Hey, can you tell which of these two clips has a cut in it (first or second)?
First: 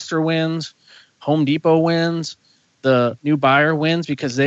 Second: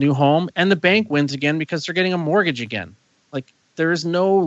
first